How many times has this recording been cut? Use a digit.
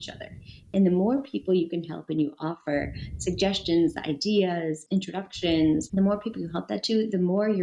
2